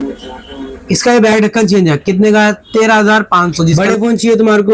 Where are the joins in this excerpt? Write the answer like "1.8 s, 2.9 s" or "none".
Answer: 3.7 s

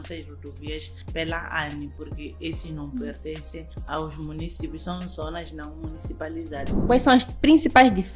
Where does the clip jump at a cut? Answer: 6.8 s

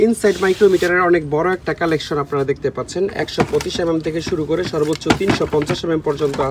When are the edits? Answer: none

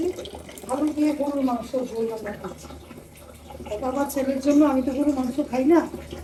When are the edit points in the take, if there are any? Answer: none

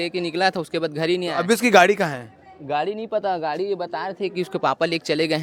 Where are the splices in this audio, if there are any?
none

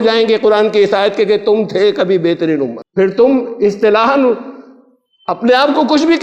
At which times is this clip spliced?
none

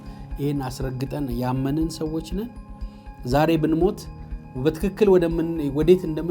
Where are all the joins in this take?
none

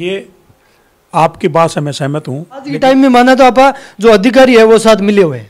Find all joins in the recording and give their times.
2.7 s

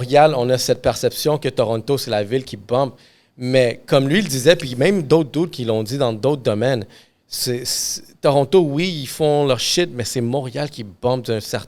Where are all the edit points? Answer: none

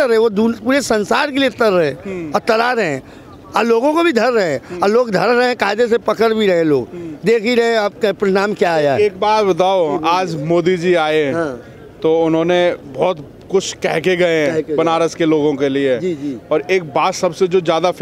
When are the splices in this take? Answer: none

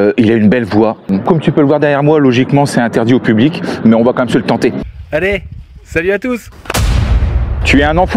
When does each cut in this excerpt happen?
1.1 s, 4.8 s

